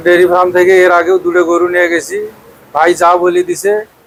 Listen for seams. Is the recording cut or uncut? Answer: uncut